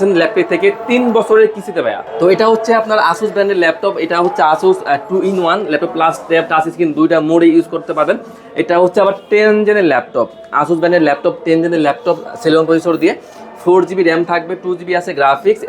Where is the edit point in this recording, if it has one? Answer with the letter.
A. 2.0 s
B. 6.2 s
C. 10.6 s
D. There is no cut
A